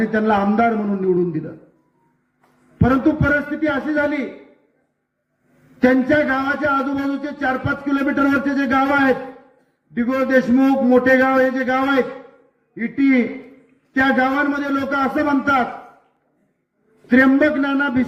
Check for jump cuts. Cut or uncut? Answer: uncut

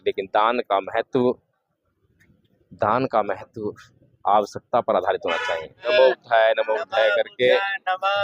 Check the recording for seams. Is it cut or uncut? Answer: cut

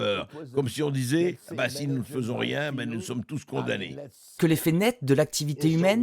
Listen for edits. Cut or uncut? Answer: cut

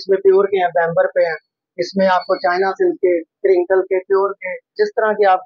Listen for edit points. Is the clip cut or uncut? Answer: uncut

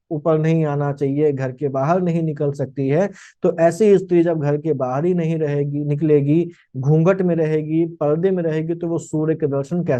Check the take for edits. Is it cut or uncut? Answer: uncut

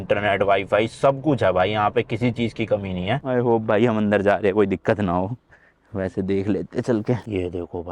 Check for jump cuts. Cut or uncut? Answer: cut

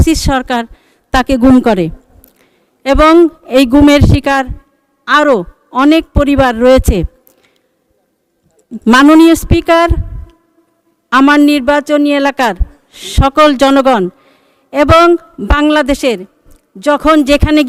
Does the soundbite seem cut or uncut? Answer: uncut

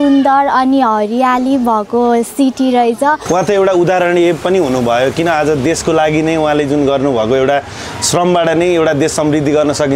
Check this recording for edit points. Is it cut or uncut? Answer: cut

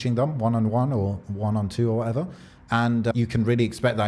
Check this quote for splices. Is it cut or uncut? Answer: cut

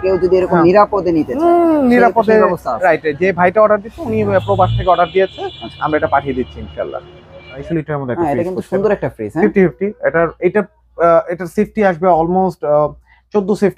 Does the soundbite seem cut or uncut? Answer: cut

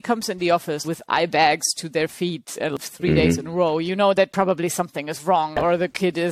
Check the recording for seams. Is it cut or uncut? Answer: cut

